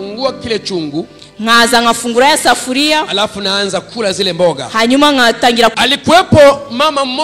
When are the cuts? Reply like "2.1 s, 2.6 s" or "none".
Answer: 5.7 s